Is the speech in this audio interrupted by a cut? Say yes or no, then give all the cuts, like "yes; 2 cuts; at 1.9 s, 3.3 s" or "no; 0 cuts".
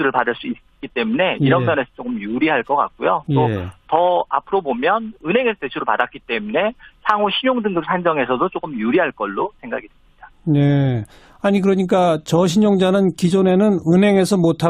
no; 0 cuts